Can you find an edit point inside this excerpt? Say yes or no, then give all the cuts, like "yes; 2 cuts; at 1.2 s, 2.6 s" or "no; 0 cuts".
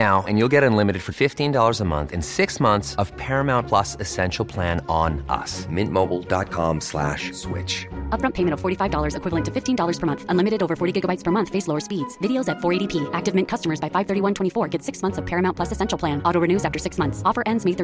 no; 0 cuts